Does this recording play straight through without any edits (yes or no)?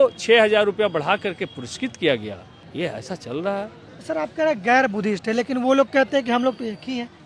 yes